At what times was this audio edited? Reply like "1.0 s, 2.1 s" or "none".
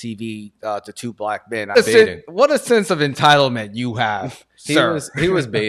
1.8 s